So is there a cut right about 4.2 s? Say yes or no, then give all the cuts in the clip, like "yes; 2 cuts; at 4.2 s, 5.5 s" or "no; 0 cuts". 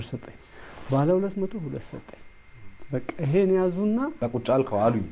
yes; 1 cut; at 4.2 s